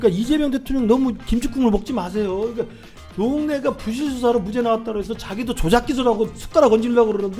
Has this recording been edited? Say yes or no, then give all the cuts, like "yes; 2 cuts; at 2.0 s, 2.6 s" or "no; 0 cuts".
yes; 1 cut; at 1.2 s